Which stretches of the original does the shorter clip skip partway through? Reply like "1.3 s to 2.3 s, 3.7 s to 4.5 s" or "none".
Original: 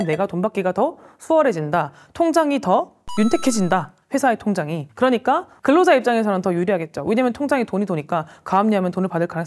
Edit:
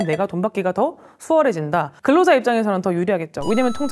1.9 s to 5.5 s